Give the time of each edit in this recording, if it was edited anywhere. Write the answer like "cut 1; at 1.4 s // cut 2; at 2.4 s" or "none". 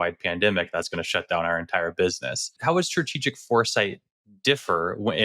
cut 1; at 2.6 s